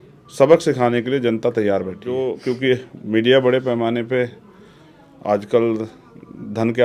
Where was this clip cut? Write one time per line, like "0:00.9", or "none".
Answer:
0:02.3